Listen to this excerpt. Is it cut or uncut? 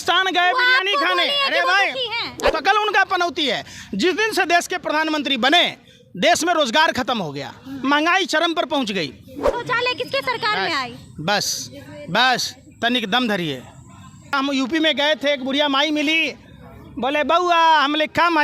cut